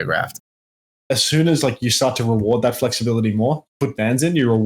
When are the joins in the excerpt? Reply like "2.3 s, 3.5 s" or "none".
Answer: 0.9 s